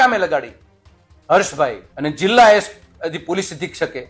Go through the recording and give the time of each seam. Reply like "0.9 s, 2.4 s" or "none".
1.9 s